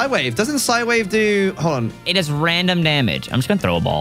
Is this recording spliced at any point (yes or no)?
yes